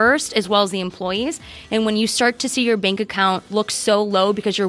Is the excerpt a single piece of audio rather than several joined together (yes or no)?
no